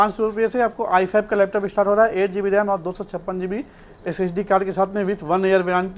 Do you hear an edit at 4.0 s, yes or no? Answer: no